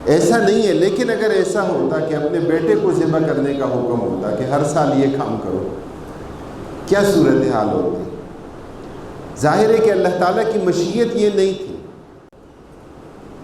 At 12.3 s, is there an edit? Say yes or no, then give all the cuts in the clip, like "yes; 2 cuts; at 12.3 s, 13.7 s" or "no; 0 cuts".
yes; 1 cut; at 12.3 s